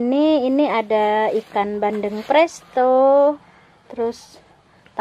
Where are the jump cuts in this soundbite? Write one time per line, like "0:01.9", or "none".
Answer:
none